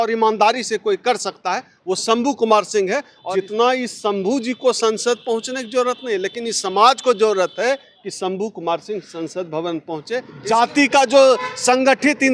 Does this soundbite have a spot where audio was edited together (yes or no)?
yes